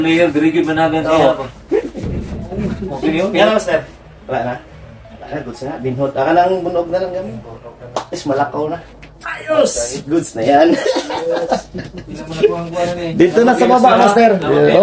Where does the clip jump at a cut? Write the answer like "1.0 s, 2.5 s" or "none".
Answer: 3.3 s